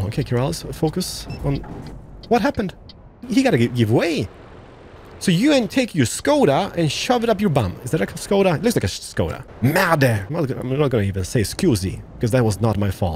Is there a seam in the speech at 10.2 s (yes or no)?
yes